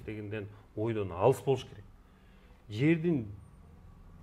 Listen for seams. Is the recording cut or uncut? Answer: uncut